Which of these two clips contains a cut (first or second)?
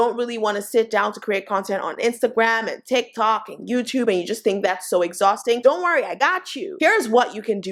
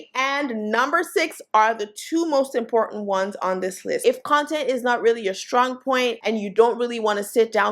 second